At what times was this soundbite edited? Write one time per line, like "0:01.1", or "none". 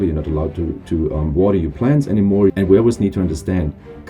0:02.5